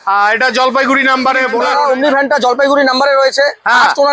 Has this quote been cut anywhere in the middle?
yes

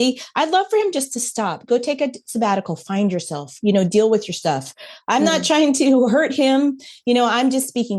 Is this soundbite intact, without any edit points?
yes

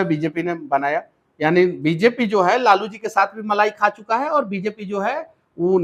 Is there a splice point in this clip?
no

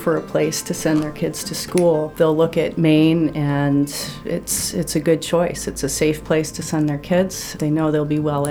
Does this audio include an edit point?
yes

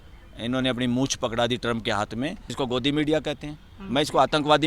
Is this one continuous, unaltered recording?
no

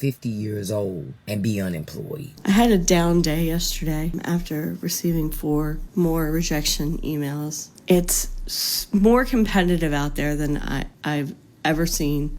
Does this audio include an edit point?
yes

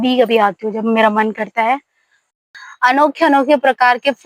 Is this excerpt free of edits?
no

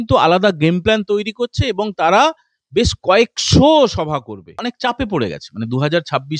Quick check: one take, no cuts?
no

